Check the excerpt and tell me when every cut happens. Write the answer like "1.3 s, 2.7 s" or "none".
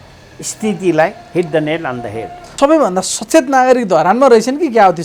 2.5 s